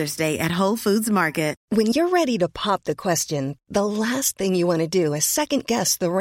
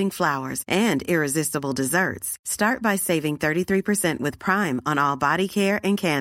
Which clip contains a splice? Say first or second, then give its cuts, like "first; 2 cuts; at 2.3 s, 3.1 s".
first; 1 cut; at 1.6 s